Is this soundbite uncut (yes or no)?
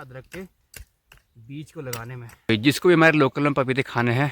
no